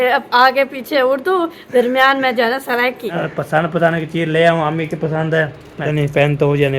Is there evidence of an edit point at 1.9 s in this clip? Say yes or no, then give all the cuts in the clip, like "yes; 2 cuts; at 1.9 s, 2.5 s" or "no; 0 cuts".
no; 2 cuts; at 3.2 s, 5.9 s